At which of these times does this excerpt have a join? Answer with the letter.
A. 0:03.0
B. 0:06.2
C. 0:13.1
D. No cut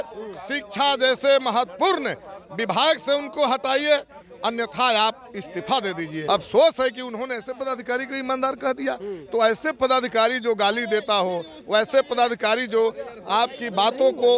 B